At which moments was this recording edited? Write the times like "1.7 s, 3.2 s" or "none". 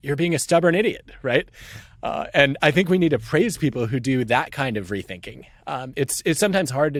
none